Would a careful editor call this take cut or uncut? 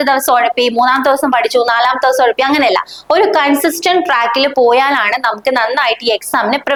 uncut